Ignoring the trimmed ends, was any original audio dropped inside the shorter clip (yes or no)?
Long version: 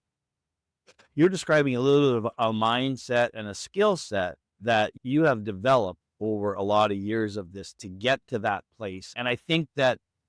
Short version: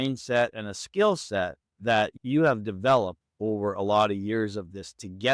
no